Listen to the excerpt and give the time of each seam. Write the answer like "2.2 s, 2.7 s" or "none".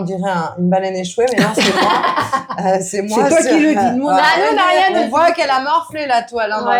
none